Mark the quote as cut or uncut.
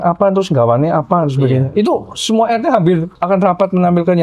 cut